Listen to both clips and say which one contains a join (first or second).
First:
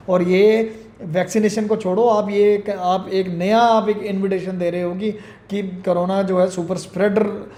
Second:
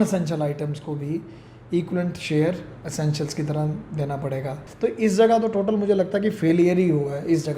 second